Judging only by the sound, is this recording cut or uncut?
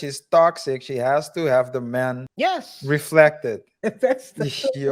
cut